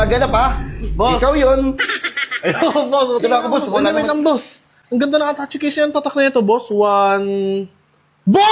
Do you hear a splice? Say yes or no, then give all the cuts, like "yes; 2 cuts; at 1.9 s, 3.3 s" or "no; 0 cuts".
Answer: yes; 1 cut; at 3.2 s